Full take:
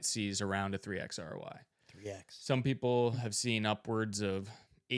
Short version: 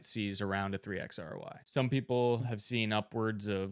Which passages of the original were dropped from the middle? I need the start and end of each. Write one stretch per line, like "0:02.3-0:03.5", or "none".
0:01.6-0:02.3